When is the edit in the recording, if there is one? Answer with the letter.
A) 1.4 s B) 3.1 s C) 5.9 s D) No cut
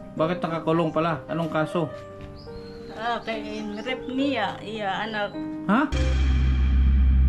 C